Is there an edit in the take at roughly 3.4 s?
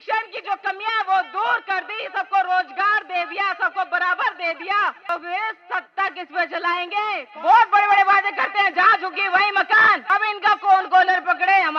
no; 3 cuts; at 5.1 s, 7.3 s, 10.0 s

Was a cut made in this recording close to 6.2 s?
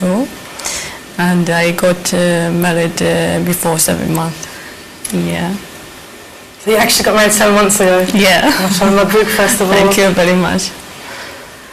no; 0 cuts

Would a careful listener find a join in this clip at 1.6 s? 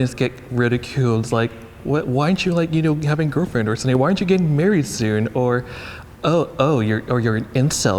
no; 0 cuts

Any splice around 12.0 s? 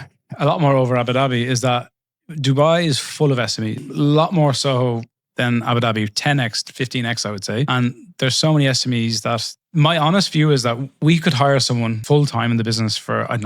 yes; 1 cut; at 12.0 s

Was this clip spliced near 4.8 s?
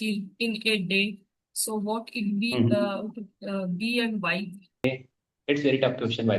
yes; 1 cut; at 4.8 s

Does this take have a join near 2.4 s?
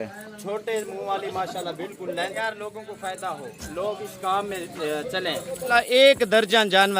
yes; 2 cuts; at 2.4 s, 5.7 s

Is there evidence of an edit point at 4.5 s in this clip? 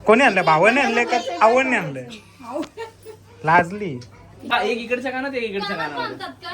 yes; 1 cut; at 4.5 s

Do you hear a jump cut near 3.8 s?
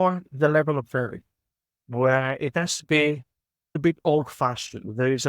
yes; 1 cut; at 3.8 s

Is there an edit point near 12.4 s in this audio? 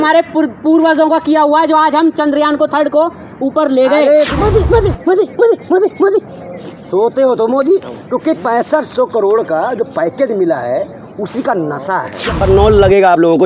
yes; 2 cuts; at 4.3 s, 12.4 s

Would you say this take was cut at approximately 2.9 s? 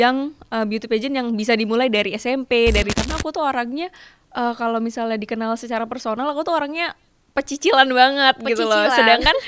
yes; 1 cut; at 2.9 s

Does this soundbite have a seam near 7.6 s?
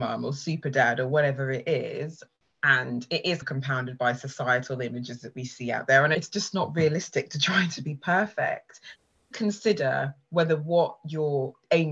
no; 3 cuts; at 2.2 s, 6.2 s, 9.0 s

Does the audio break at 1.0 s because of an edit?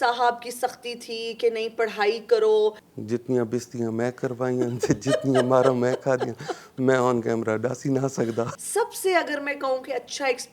no; 2 cuts; at 2.9 s, 8.5 s

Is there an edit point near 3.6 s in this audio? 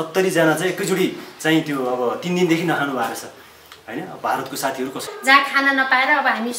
no; 1 cut; at 5.1 s

